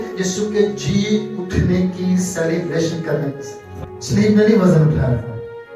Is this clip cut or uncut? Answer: cut